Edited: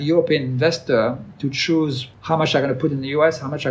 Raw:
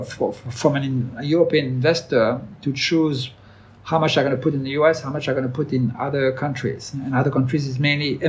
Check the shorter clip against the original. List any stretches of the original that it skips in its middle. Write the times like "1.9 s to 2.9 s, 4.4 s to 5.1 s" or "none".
3.3 s to 3.7 s

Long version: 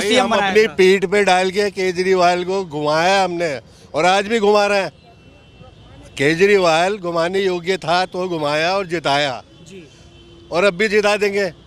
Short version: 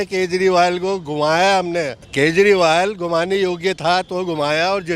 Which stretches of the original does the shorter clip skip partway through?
3.7 s to 6.0 s

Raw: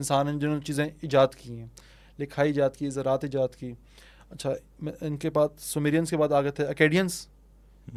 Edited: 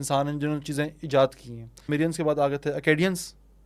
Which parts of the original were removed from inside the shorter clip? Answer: 1.7 s to 5.7 s

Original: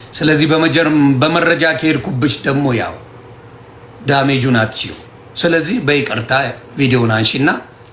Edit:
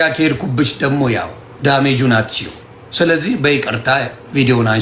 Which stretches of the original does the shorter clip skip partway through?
3.1 s to 3.8 s

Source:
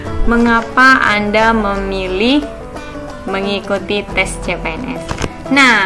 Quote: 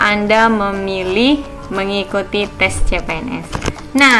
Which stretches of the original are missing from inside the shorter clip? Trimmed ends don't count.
2.6 s to 3.1 s

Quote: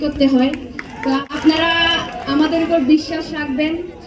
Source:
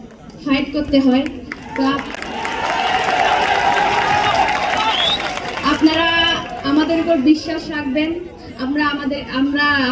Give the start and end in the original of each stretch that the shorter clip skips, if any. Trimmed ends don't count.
2.0 s to 5.7 s

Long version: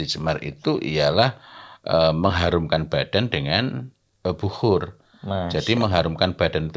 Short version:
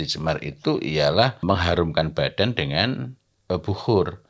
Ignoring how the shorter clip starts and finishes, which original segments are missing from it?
1.4 s to 2.2 s

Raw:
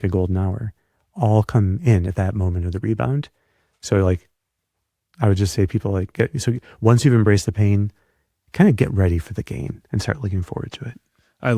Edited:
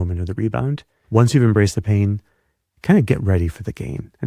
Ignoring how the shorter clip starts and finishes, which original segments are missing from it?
3.4 s to 6.7 s

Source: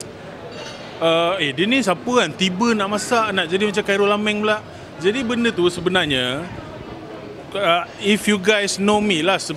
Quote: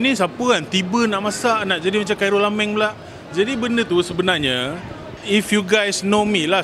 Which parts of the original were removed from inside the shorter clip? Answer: 6.8 s to 7.9 s

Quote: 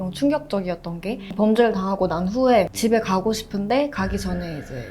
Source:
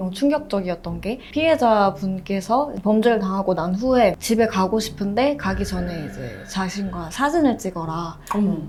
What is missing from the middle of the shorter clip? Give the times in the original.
1.3 s to 2.7 s

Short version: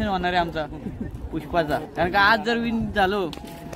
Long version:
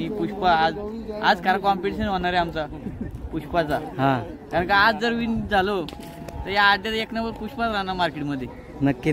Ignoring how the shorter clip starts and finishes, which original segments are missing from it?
3.9 s to 4.4 s

